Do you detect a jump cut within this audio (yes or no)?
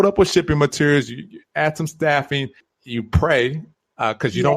yes